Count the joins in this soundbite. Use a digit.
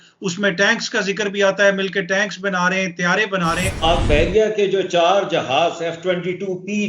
1